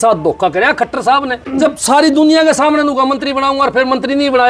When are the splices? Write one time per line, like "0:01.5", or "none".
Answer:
0:01.4